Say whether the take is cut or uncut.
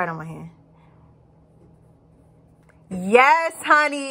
uncut